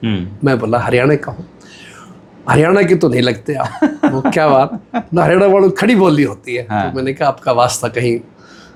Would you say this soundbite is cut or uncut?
uncut